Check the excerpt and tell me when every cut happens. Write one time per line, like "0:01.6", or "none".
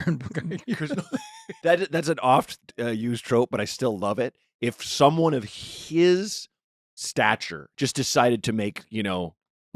0:01.6
0:02.5
0:07.6